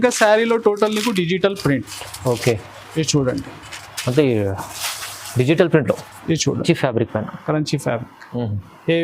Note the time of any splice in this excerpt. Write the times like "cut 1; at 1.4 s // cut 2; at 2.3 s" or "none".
cut 1; at 6.6 s